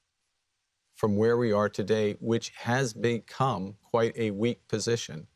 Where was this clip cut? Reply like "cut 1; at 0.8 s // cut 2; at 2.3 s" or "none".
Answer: none